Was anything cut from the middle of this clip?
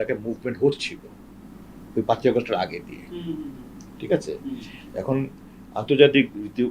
no; 0 cuts

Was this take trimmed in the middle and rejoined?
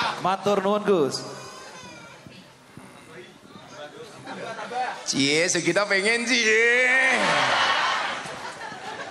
no; 0 cuts

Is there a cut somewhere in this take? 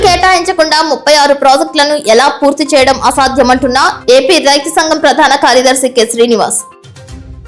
no; 0 cuts

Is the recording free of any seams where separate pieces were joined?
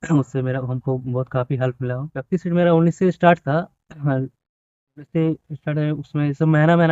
no; 1 cut; at 2.1 s

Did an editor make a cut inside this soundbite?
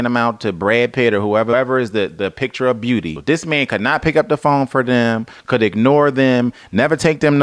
yes; 2 cuts; at 1.5 s, 3.1 s

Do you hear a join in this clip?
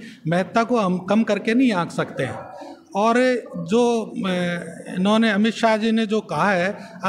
no; 0 cuts

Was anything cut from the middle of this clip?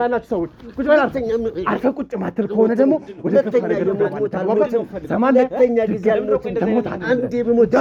no; 0 cuts

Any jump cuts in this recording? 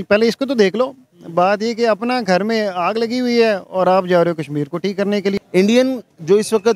yes; 1 cut; at 5.4 s

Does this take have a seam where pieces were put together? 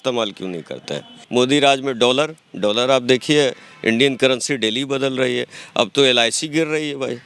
yes; 1 cut; at 1.2 s

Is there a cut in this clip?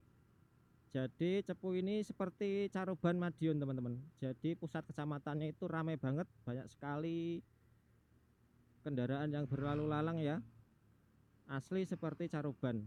no; 0 cuts

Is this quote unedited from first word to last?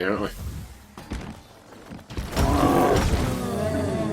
no; 1 cut; at 1.0 s

